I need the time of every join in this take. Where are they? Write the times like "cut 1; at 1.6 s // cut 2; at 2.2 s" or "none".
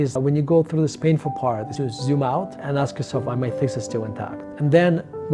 cut 1; at 1.7 s // cut 2; at 4.4 s